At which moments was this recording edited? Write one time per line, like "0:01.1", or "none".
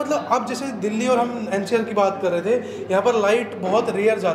none